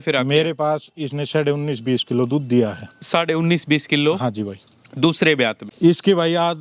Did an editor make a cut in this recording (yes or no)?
yes